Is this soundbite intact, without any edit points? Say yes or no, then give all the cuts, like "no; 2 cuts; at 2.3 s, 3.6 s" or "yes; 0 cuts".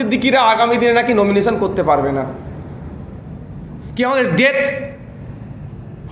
yes; 0 cuts